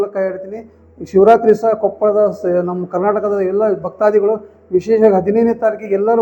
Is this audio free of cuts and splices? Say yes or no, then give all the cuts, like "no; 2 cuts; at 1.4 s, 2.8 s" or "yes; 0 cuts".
yes; 0 cuts